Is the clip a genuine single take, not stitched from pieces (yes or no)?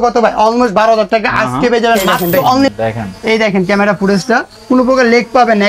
no